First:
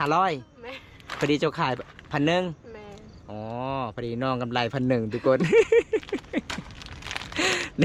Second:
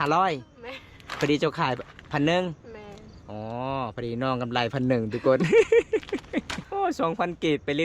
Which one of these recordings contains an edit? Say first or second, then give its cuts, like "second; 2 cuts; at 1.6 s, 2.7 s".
second; 1 cut; at 6.6 s